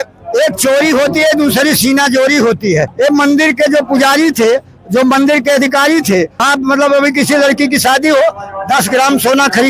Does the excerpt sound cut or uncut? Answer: cut